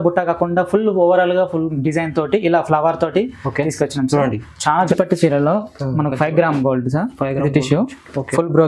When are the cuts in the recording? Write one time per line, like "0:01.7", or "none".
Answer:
0:04.9